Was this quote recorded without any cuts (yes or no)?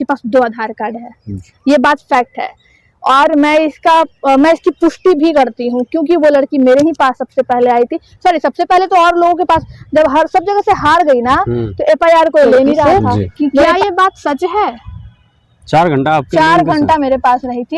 yes